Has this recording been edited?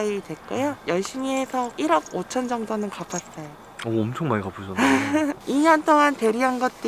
no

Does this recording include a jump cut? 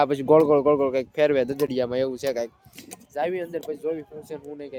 no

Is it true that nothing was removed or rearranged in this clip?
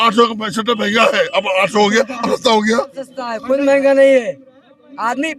no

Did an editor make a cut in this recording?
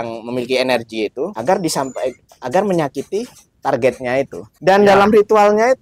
yes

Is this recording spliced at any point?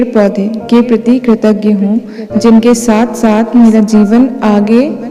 no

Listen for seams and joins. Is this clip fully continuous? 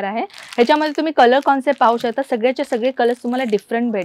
yes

